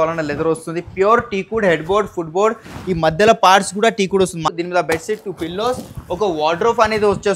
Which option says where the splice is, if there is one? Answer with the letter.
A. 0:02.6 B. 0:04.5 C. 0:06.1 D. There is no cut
B